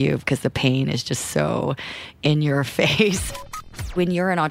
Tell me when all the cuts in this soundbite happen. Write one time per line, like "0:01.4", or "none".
0:03.6